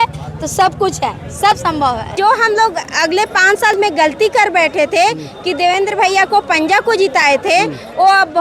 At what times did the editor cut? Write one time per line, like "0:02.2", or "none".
0:02.1

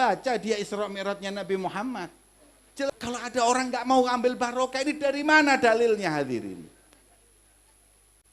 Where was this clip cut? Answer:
0:02.9

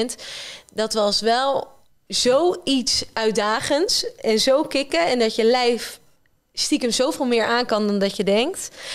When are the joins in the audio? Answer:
none

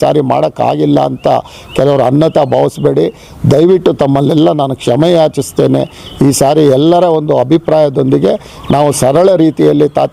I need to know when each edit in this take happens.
none

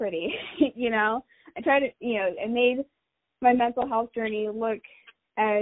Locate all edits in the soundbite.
none

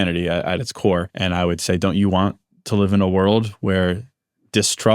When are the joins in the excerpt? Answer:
0:01.1

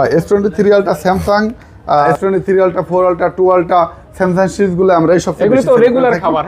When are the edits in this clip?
none

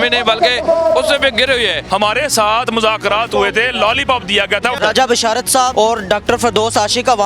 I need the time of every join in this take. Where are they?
0:01.8
0:04.8
0:05.7

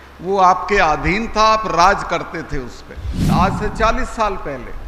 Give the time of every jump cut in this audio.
0:03.2

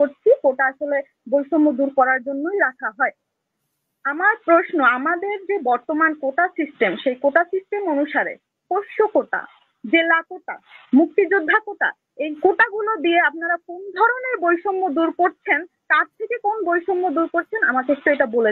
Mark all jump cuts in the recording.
none

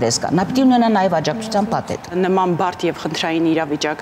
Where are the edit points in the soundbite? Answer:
0:02.1

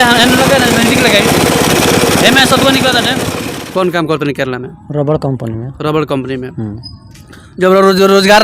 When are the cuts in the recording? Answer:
0:03.3

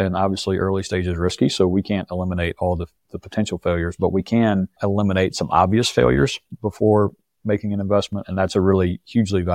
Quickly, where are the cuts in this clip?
0:04.7

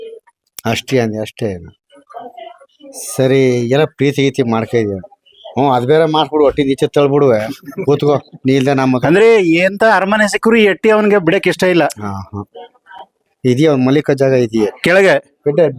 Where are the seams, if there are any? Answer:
none

